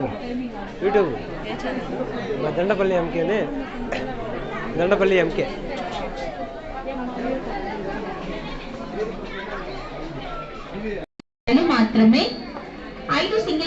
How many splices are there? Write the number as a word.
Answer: one